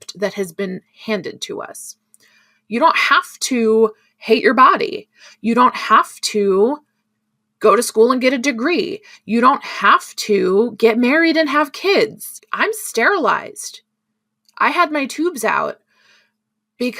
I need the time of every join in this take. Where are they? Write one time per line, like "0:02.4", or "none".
none